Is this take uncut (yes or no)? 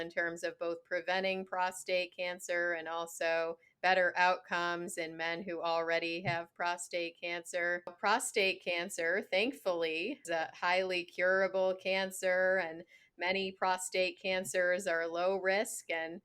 no